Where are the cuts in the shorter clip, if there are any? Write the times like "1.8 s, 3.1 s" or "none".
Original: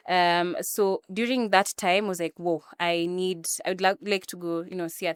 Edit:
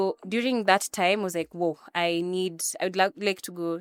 none

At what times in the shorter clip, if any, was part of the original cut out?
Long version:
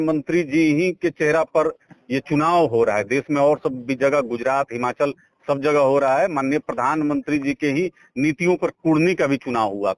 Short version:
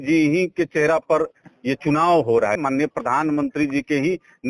2.6 s

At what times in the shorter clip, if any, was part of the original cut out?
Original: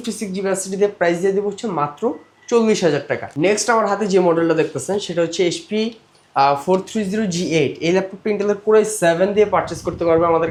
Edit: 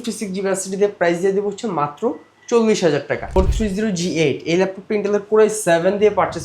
3.3 s

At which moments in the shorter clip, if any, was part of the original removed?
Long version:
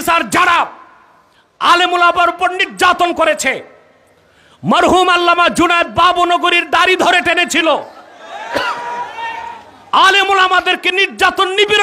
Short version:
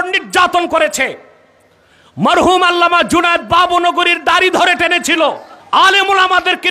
5.5 s

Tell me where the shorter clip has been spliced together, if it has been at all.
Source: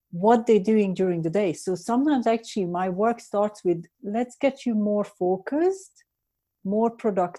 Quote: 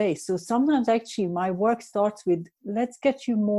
none

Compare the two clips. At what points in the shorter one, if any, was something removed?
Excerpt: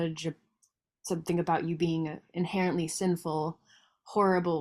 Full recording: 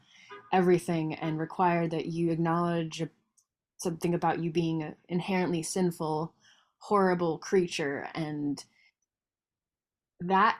none

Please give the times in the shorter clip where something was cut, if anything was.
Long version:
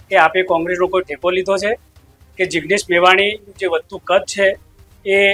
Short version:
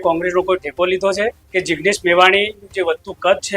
1.4 s

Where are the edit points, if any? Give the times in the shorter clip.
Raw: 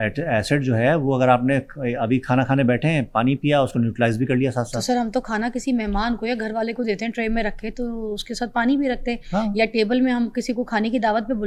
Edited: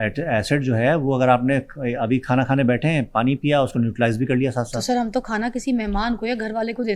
none

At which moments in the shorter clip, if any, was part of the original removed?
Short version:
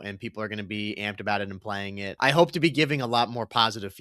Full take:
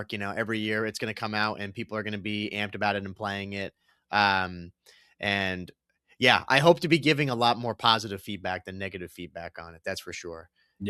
2.2 s

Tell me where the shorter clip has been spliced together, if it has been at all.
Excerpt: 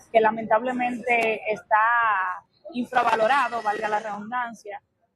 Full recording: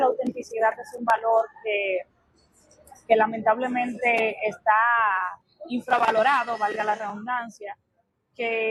none

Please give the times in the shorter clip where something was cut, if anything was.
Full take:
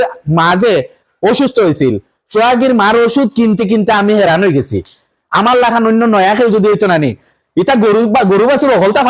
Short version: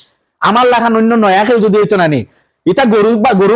none

